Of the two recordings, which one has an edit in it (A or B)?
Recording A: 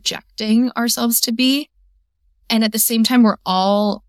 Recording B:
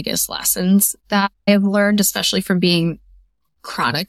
B